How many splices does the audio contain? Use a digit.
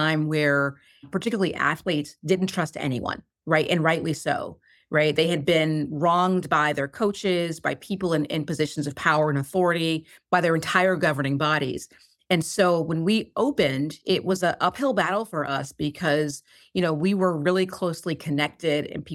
1